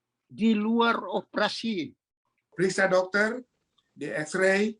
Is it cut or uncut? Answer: cut